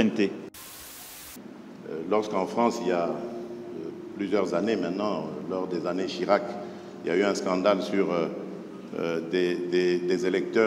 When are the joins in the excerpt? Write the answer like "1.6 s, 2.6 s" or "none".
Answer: 1.1 s